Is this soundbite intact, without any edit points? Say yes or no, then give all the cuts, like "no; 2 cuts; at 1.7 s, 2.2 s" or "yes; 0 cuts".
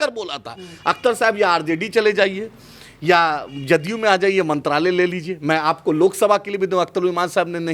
yes; 0 cuts